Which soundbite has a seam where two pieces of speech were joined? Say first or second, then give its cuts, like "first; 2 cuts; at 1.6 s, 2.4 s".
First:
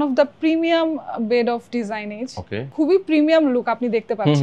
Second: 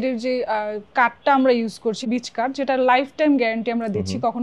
first; 1 cut; at 2.6 s